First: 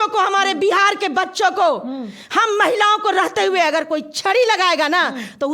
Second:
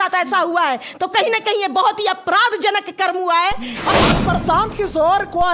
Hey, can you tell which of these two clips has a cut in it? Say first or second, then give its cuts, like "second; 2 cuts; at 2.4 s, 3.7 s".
second; 1 cut; at 3.9 s